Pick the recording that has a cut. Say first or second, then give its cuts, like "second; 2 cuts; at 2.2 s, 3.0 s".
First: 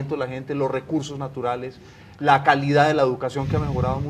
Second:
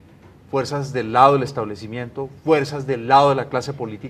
first; 1 cut; at 1.6 s